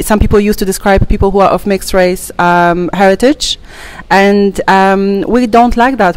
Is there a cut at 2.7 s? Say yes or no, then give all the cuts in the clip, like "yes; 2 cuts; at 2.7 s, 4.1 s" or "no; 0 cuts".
no; 0 cuts